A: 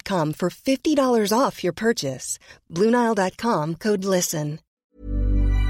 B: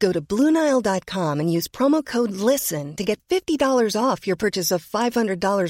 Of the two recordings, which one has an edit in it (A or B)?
A